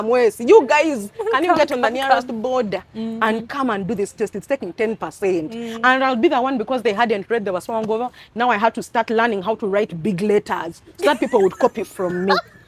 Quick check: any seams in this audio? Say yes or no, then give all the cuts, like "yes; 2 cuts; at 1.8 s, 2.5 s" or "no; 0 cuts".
no; 0 cuts